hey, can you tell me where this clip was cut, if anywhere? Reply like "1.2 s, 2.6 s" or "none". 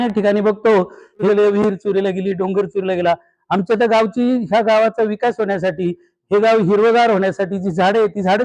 1.2 s